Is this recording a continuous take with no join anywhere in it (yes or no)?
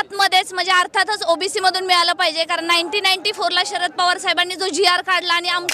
yes